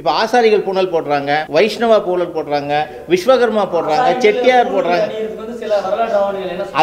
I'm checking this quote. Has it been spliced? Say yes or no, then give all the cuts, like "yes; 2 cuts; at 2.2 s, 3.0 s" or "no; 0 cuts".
yes; 1 cut; at 1.4 s